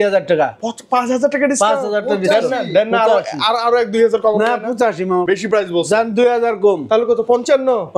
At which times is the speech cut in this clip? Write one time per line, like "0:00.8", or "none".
0:05.2